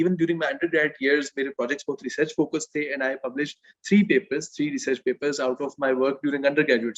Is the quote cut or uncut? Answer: uncut